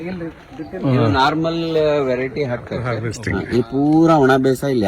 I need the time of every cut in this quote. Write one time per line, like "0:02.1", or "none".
0:03.2